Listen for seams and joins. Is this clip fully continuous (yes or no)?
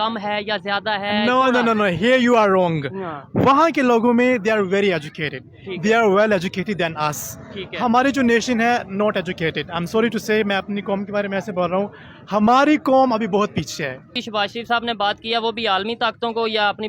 no